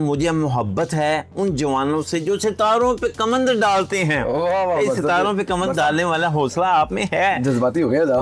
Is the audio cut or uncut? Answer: uncut